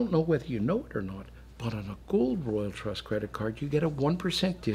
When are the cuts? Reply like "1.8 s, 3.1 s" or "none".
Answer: none